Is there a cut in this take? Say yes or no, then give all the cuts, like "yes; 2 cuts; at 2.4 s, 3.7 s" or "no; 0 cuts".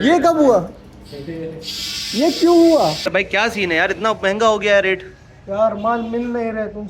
yes; 1 cut; at 2.8 s